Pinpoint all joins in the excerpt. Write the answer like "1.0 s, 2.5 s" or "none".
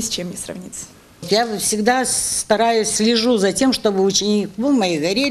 1.2 s